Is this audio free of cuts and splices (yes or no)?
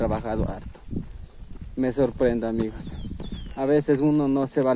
yes